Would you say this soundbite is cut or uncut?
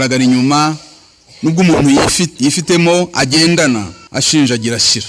cut